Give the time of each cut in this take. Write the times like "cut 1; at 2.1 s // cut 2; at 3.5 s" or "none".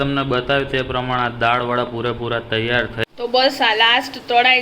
cut 1; at 3.0 s